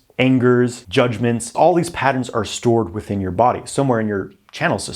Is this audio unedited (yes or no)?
no